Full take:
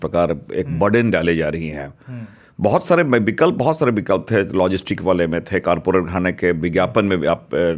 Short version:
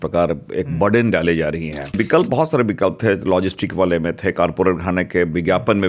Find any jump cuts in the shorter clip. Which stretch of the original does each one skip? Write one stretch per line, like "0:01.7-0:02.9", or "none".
0:01.9-0:03.2